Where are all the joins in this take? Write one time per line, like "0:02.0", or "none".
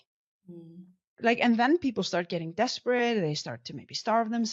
0:01.2